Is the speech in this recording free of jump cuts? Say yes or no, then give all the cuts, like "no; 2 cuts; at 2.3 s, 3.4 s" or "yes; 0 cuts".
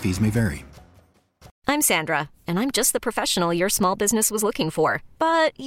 no; 1 cut; at 1.5 s